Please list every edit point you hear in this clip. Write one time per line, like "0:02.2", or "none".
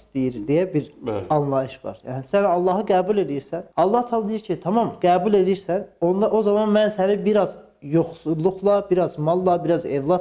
none